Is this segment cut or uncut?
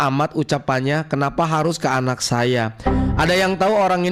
uncut